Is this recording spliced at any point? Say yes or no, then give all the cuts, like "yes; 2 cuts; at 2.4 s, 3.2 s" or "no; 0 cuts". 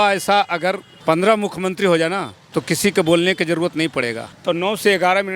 yes; 1 cut; at 4.2 s